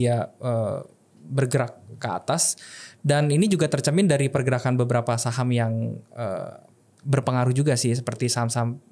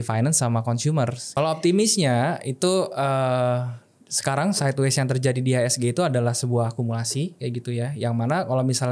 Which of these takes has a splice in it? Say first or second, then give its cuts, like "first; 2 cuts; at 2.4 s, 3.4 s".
second; 1 cut; at 1.2 s